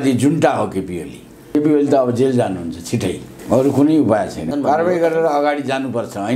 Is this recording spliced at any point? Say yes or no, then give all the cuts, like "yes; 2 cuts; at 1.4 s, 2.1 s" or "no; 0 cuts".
yes; 3 cuts; at 1.5 s, 3.3 s, 4.5 s